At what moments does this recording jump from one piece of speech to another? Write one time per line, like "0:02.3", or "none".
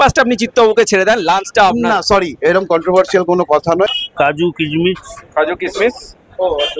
0:03.9